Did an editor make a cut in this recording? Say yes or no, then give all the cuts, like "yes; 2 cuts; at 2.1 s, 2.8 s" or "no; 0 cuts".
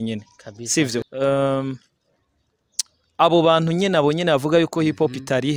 yes; 1 cut; at 1.0 s